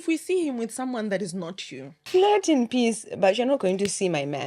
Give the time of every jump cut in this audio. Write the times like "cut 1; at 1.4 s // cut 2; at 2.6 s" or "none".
cut 1; at 2.0 s

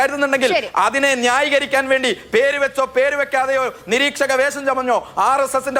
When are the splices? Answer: none

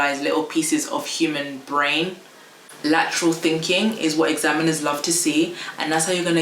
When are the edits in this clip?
cut 1; at 2.7 s

